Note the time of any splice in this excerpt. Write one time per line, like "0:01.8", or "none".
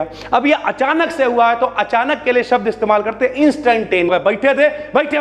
0:04.1